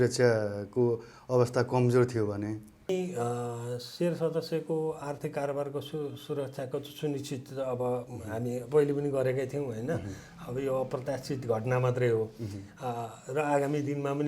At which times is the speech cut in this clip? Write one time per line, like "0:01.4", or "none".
0:02.9